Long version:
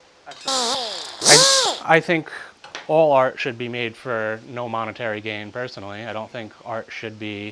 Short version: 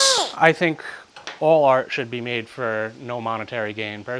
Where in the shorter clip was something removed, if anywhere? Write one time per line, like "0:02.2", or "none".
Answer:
none